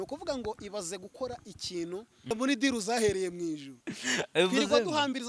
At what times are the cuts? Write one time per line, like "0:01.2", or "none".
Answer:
0:02.3